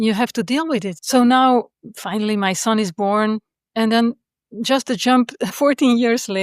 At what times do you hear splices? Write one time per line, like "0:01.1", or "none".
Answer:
0:01.0
0:01.8
0:05.5